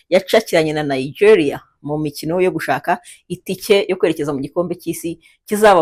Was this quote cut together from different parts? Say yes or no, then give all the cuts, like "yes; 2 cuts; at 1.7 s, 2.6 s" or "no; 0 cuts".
no; 0 cuts